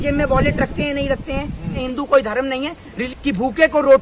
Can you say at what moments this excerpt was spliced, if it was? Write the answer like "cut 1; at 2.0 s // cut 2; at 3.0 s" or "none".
cut 1; at 1.8 s // cut 2; at 3.0 s